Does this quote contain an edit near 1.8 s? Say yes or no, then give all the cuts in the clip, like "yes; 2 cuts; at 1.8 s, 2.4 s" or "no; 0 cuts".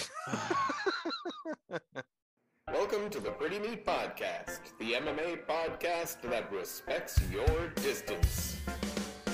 yes; 1 cut; at 1.8 s